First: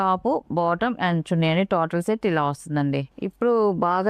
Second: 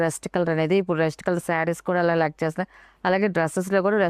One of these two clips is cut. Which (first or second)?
first